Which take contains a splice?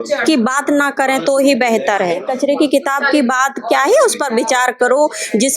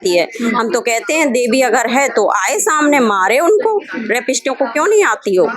first; 1 cut; at 2.3 s

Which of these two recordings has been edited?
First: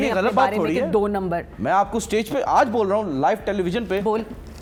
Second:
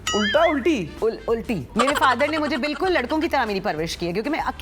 second; 1 cut; at 1.6 s

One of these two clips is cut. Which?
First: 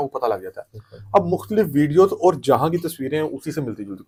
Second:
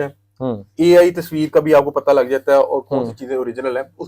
second; 1 cut; at 1.3 s

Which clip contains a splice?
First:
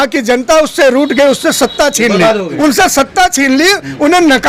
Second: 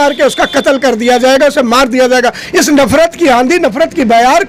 first; 1 cut; at 2.5 s

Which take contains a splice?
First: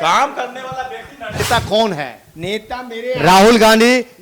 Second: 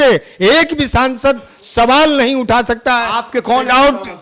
first; 1 cut; at 1.4 s

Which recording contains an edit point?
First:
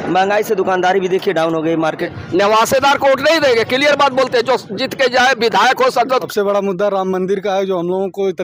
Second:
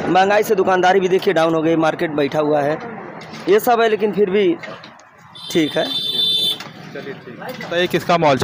first; 2 cuts; at 2.1 s, 6.3 s

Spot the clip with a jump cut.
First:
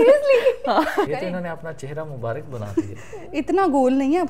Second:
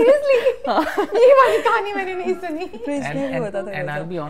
first; 1 cut; at 1.1 s

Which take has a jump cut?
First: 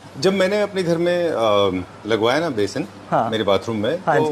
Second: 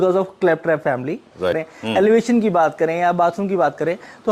second; 1 cut; at 1.6 s

